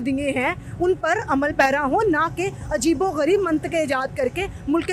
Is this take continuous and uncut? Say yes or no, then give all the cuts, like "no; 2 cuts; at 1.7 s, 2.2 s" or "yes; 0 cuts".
yes; 0 cuts